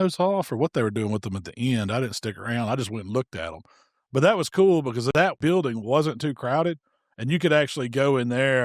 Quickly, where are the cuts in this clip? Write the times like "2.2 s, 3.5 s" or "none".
5.3 s